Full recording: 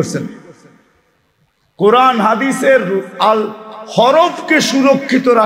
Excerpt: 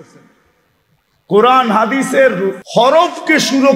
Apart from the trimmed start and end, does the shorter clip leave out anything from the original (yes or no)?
yes